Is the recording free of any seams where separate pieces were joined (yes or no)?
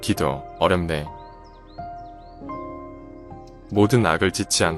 no